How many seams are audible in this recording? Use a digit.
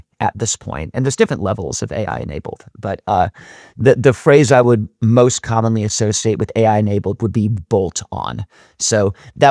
0